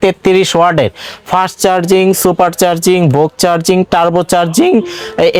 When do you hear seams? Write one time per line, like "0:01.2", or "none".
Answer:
none